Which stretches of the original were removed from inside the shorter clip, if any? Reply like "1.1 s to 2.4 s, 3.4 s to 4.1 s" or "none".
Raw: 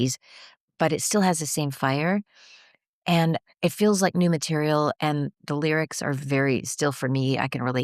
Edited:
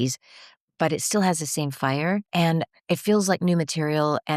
2.3 s to 3.0 s